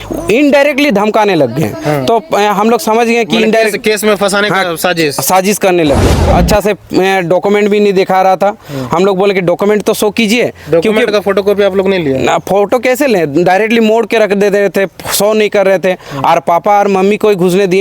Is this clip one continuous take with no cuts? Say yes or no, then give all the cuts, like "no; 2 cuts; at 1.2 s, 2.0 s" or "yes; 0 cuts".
no; 1 cut; at 6.2 s